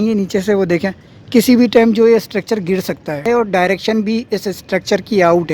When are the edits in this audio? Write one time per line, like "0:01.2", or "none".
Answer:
0:03.2